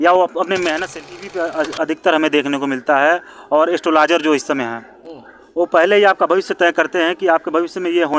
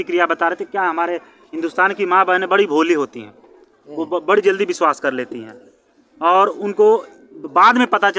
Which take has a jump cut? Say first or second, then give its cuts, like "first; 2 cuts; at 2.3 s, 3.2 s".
first; 1 cut; at 1.1 s